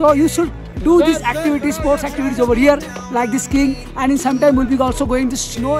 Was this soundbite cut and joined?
no; 0 cuts

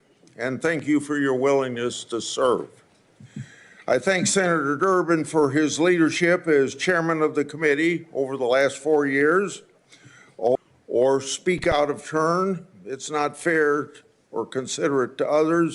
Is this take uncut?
no; 1 cut; at 10.6 s

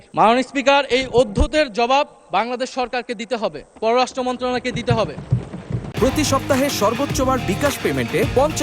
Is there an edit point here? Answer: yes; 1 cut; at 5.8 s

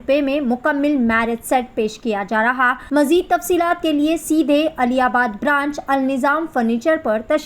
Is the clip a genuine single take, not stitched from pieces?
no; 1 cut; at 2.8 s

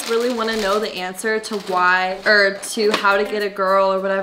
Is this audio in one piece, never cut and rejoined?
yes; 0 cuts

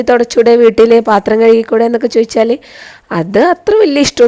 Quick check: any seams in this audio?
no; 0 cuts

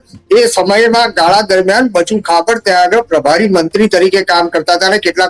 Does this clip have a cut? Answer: no; 0 cuts

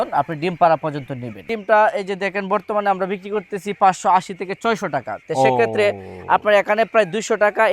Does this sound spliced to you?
yes; 1 cut; at 1.4 s

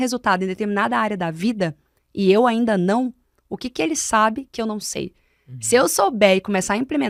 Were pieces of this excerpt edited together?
no; 0 cuts

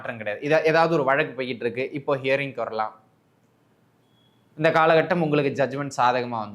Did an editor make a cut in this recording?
no; 0 cuts

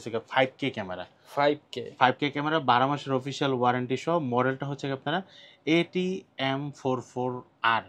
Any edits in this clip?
no; 0 cuts

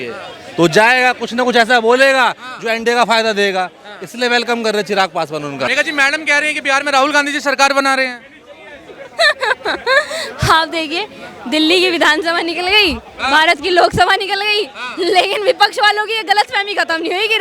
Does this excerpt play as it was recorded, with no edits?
no; 1 cut; at 5.7 s

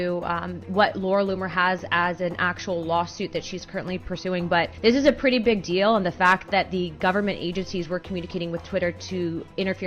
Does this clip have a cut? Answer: yes; 1 cut; at 4.7 s

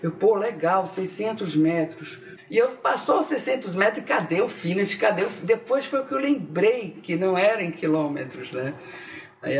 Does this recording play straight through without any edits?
no; 1 cut; at 2.3 s

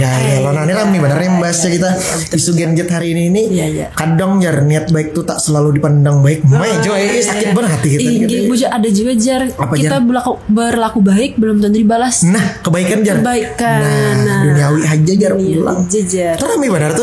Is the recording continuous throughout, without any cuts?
yes; 0 cuts

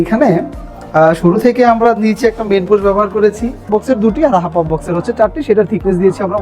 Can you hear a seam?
yes; 1 cut; at 3.7 s

